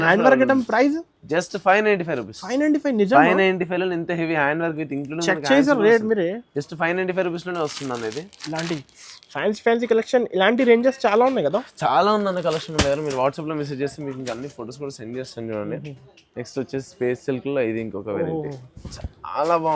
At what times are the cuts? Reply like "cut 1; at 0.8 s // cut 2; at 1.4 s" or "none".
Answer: none